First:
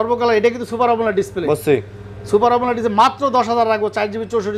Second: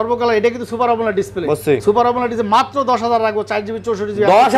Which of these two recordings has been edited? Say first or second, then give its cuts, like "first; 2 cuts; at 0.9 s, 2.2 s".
second; 1 cut; at 1.8 s